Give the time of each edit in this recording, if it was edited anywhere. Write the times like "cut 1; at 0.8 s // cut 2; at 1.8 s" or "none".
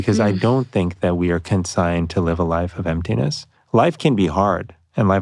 cut 1; at 3.5 s